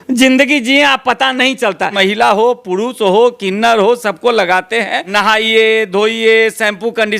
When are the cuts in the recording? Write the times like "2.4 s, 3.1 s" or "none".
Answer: 1.9 s, 5.0 s